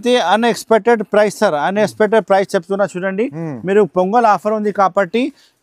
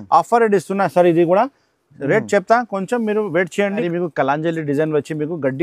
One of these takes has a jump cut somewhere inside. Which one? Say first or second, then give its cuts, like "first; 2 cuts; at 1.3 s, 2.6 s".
second; 1 cut; at 3.9 s